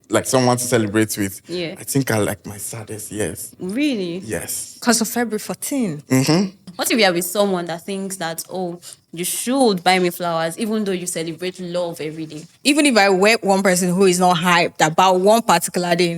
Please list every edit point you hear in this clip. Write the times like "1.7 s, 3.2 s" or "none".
6.7 s, 12.6 s

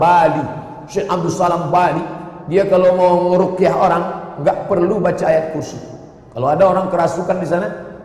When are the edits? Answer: none

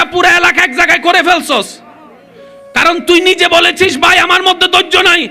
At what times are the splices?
none

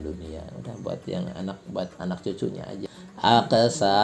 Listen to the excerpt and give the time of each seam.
3.0 s

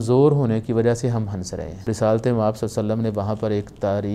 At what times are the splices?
1.9 s

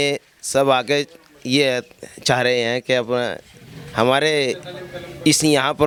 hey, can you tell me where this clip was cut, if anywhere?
none

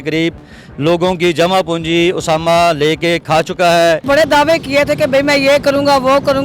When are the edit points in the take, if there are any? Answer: 4.0 s

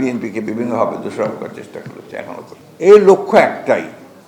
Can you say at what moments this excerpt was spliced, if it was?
2.6 s

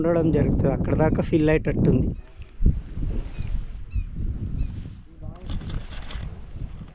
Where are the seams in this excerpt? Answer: none

